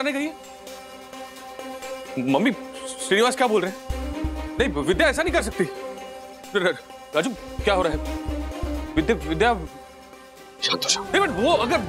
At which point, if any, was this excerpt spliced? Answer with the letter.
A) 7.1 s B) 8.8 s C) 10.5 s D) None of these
C